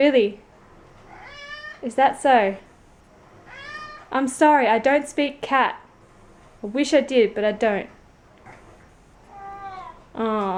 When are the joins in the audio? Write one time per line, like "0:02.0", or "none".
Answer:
none